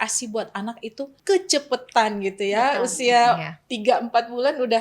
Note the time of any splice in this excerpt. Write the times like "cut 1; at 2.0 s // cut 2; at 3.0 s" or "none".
cut 1; at 1.2 s